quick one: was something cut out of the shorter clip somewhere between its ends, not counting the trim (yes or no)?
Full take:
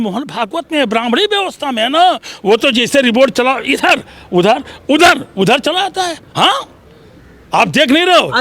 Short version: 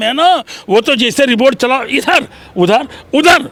no